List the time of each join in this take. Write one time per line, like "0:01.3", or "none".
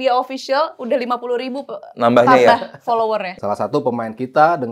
0:03.3